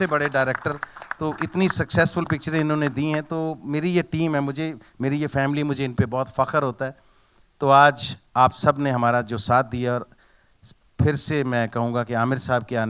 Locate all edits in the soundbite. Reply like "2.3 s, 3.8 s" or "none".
none